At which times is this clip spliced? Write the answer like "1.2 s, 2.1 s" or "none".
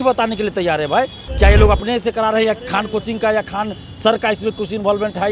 1.2 s